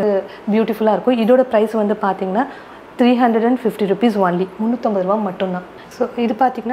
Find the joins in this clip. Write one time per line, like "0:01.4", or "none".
0:05.8